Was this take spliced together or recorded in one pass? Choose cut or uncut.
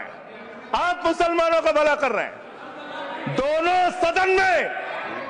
uncut